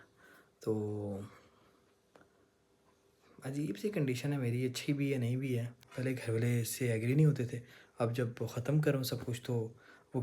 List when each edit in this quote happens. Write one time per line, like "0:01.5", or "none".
0:05.8